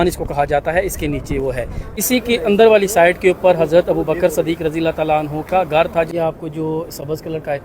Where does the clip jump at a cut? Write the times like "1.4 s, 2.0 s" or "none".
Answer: 1.8 s, 6.1 s